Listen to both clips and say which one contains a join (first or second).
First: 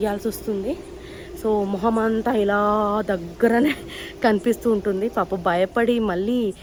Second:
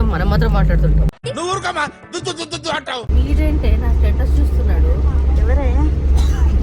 second